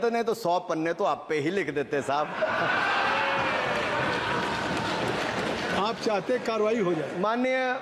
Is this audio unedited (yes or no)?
yes